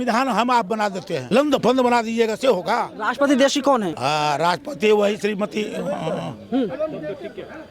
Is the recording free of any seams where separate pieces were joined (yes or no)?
no